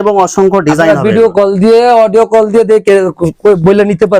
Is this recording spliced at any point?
no; 0 cuts

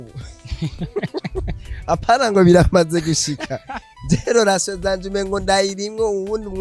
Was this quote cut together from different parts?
no; 0 cuts

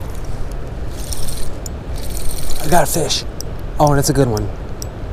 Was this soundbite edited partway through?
no; 0 cuts

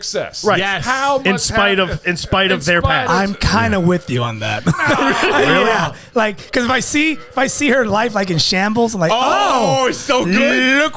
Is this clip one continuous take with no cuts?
yes; 0 cuts

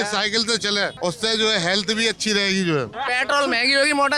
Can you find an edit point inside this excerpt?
yes; 2 cuts; at 0.9 s, 3.0 s

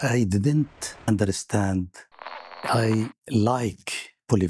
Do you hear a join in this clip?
yes; 2 cuts; at 1.1 s, 2.6 s

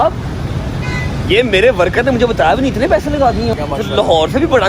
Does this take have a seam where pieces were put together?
yes; 1 cut; at 3.5 s

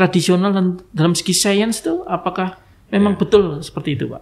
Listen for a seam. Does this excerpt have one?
no; 0 cuts

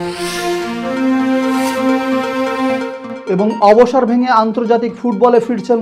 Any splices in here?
no; 0 cuts

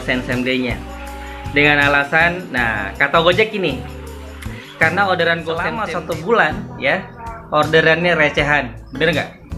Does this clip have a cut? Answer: yes; 1 cut; at 5.8 s

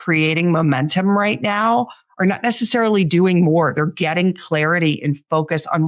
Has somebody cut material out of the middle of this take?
no; 0 cuts

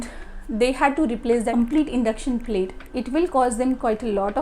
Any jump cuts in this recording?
yes; 1 cut; at 2.9 s

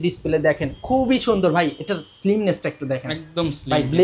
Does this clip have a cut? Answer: no; 0 cuts

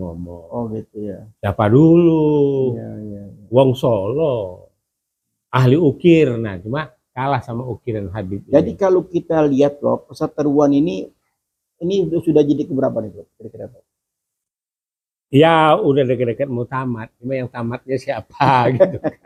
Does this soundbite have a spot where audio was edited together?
no; 0 cuts

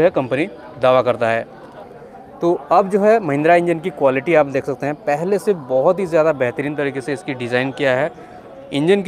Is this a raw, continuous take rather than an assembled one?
yes; 0 cuts

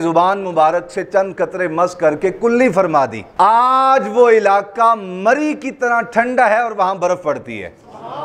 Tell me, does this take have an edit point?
no; 0 cuts

